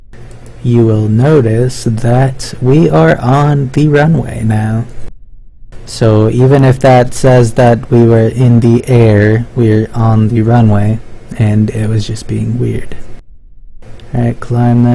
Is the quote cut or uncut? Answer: cut